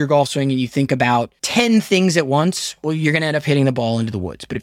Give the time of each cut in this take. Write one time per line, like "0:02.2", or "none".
0:01.4